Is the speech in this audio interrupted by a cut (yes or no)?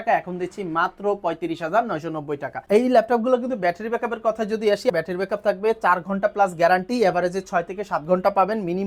yes